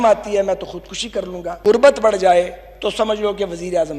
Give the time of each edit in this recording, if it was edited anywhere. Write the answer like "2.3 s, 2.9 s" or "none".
1.8 s